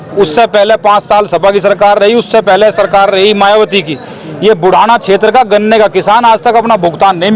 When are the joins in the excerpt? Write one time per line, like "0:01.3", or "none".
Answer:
none